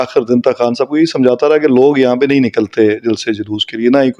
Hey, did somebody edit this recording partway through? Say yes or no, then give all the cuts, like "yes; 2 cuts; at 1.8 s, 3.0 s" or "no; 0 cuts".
no; 0 cuts